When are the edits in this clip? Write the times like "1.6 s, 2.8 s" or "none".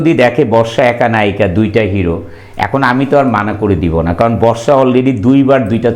none